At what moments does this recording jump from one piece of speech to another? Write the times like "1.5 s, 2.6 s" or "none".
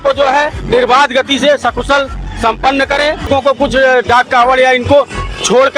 3.3 s